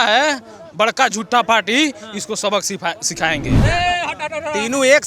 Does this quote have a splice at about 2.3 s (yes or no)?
no